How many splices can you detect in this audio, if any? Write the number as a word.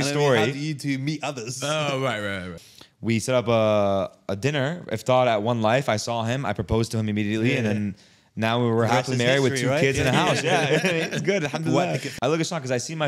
two